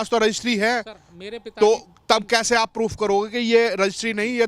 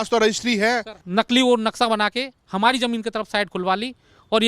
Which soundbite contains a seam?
second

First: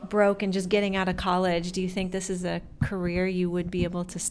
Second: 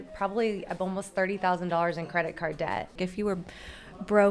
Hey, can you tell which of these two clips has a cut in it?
second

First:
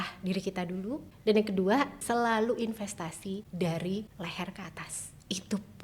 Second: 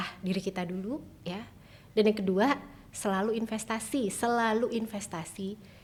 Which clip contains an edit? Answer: first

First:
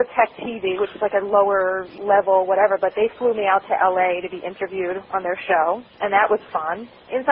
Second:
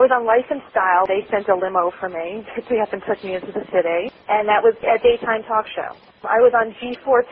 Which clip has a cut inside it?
second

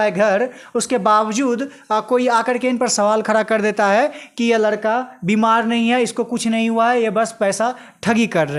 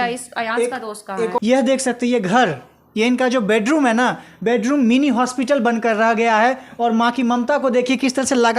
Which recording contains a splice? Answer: second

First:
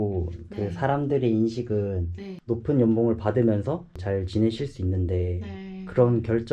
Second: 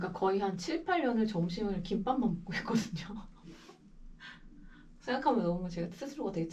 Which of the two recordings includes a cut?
first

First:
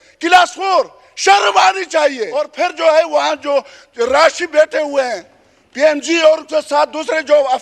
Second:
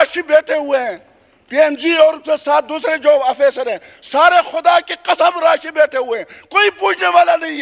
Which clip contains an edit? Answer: first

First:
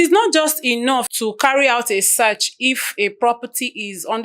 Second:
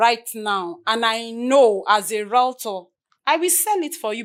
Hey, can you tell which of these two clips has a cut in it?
first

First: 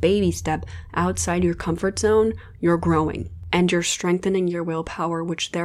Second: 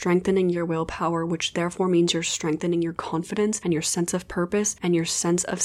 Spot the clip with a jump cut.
second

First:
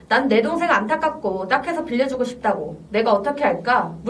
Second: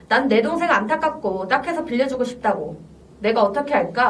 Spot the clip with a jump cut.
first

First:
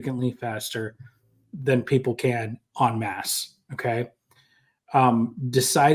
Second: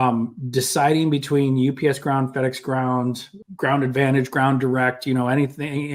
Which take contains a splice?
second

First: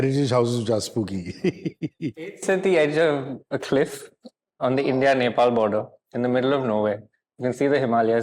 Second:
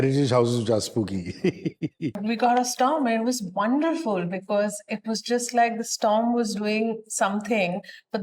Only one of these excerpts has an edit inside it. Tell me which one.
second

